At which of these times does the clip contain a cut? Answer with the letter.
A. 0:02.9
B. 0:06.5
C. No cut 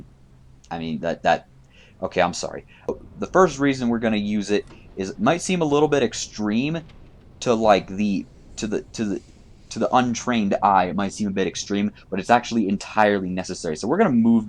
A